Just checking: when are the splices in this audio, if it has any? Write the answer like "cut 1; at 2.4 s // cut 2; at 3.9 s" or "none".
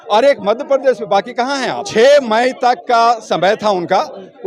cut 1; at 1.9 s